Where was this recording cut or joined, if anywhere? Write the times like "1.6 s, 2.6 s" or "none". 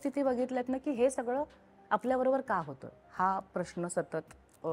none